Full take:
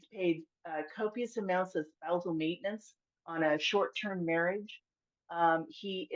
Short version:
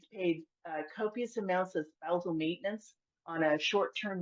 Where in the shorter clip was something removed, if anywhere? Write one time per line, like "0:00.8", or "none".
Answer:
none